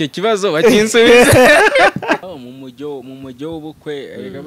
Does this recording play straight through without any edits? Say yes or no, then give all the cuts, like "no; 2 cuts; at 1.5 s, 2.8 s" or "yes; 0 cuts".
no; 1 cut; at 2.2 s